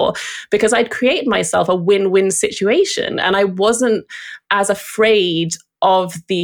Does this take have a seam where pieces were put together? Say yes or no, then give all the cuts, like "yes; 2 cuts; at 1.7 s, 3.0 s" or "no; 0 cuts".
no; 0 cuts